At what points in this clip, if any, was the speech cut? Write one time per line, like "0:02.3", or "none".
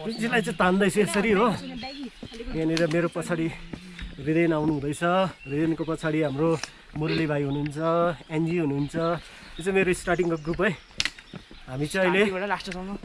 none